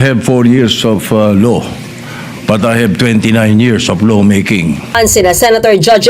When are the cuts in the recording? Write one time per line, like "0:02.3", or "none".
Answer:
0:04.8